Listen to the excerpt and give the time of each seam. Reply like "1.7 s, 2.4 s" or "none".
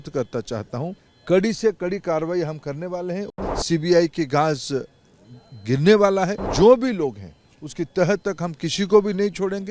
1.1 s, 3.3 s, 6.4 s